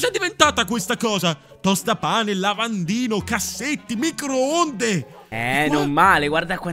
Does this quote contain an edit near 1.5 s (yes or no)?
no